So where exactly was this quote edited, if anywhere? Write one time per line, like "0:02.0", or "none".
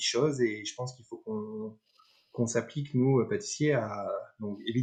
none